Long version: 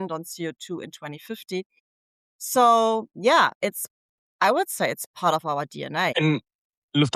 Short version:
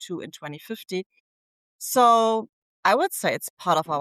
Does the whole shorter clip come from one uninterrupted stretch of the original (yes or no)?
no